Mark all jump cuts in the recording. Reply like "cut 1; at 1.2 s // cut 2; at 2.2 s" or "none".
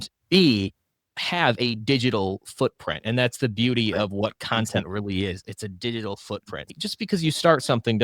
cut 1; at 6.7 s